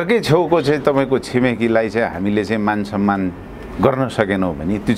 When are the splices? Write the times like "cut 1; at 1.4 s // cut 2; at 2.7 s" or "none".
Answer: none

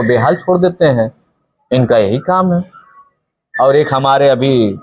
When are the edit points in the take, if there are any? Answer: none

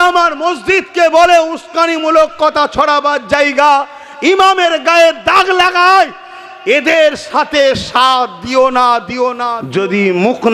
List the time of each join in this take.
cut 1; at 9.5 s

